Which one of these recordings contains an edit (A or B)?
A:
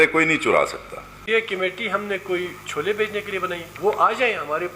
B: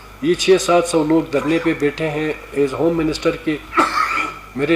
A